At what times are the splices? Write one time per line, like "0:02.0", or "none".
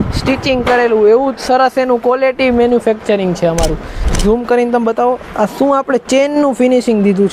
0:04.1

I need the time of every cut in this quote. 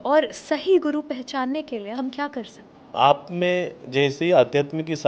0:02.6

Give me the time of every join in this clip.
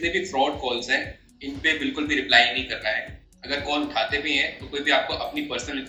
none

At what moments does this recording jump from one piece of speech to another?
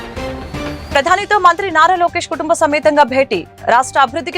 0:00.9

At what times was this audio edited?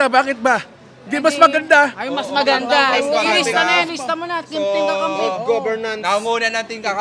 none

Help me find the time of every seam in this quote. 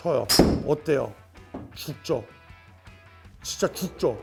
none

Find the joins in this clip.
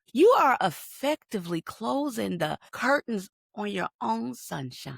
0:02.7
0:03.4

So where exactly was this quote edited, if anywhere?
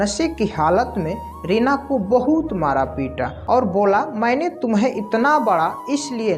0:03.3

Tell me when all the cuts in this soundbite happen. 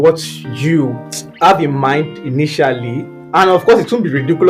0:03.3

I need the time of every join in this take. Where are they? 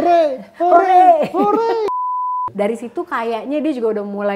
0:01.9

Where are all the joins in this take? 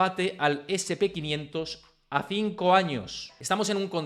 0:03.1

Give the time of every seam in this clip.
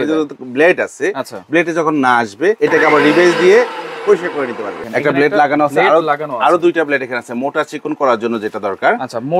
0:02.6
0:04.8

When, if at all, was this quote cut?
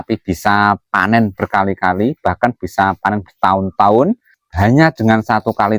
0:04.4

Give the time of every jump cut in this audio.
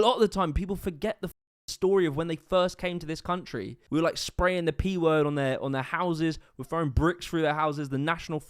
0:03.7

